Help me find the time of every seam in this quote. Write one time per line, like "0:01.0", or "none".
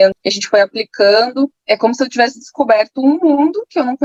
none